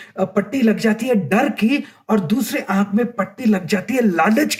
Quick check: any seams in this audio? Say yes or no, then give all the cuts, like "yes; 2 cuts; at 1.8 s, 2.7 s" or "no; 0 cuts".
no; 0 cuts